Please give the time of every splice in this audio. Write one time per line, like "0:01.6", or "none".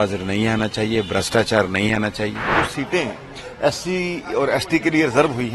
0:02.5